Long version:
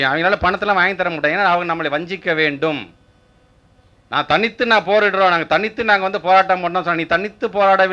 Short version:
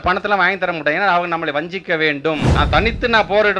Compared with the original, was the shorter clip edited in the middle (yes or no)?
yes